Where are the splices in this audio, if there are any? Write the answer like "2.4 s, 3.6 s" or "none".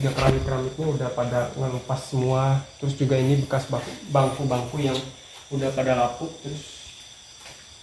none